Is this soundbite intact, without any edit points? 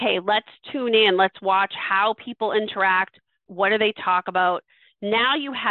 no; 1 cut; at 3.4 s

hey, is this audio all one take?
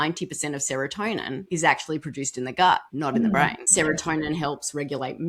no; 3 cuts; at 1.4 s, 2.9 s, 3.6 s

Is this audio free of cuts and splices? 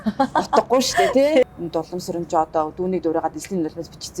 no; 1 cut; at 1.5 s

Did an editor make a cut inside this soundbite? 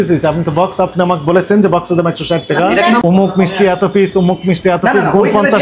yes; 1 cut; at 3.0 s

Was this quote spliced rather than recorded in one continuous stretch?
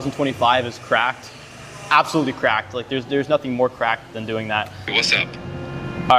yes; 1 cut; at 4.9 s

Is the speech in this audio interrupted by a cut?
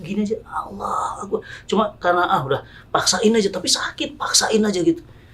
yes; 1 cut; at 2.7 s

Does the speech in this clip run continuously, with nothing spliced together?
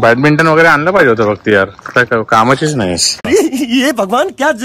yes; 0 cuts

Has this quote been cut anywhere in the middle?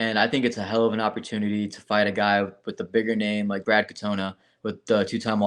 yes; 1 cut; at 3.6 s

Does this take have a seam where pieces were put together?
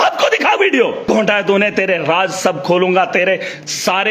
yes; 1 cut; at 1.0 s

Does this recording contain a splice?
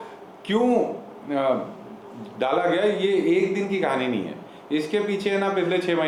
no; 0 cuts

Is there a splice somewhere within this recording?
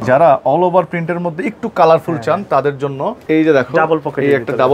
yes; 1 cut; at 3.2 s

